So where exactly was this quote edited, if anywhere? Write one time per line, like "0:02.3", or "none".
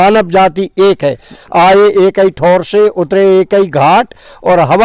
none